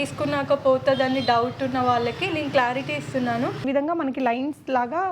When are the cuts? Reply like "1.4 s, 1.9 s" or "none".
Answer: 3.6 s